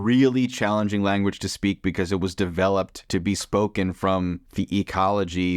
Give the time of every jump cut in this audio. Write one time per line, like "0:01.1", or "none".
0:03.0
0:04.4